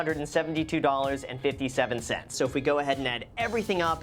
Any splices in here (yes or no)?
yes